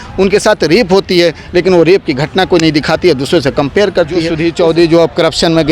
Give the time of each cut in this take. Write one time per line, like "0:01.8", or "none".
0:04.3